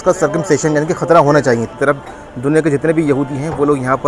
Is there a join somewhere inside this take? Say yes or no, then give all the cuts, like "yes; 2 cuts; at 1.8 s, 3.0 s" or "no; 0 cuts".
yes; 1 cut; at 1.7 s